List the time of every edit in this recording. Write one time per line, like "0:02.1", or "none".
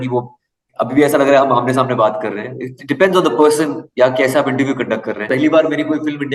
0:05.2